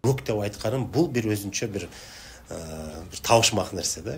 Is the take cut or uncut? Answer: uncut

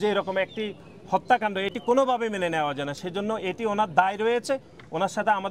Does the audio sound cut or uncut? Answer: uncut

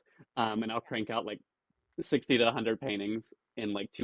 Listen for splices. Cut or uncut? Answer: uncut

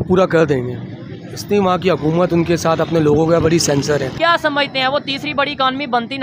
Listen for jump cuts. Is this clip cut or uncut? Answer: cut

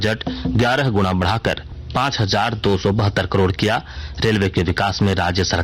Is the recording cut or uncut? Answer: cut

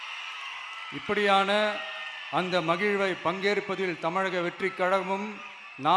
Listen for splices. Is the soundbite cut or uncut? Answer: uncut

